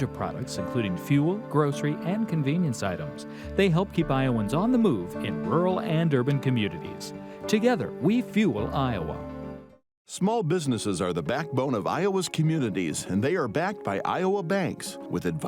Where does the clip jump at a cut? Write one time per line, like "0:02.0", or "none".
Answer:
none